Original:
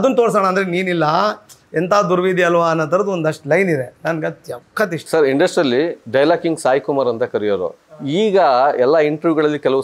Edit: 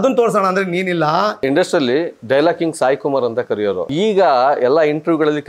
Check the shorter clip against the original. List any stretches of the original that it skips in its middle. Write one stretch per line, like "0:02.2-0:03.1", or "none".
0:01.4-0:05.3
0:07.7-0:08.0